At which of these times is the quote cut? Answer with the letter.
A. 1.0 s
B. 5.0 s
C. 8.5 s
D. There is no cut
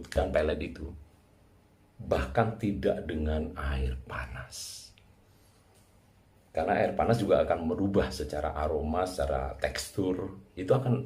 D